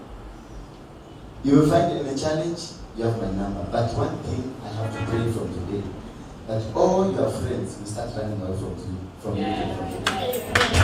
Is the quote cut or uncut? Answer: uncut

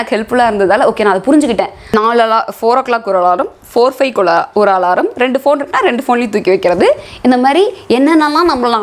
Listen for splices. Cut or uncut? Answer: cut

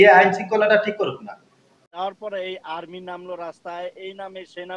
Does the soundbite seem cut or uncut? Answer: cut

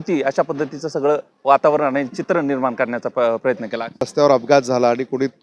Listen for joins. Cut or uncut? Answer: cut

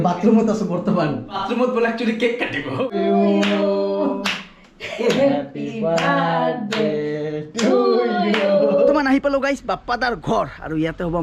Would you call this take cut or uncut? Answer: cut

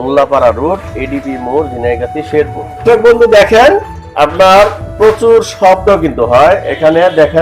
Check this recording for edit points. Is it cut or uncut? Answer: cut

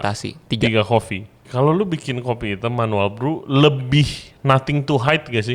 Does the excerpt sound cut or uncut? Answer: cut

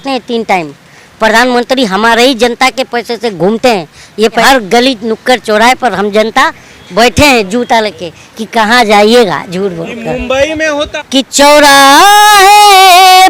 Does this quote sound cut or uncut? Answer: cut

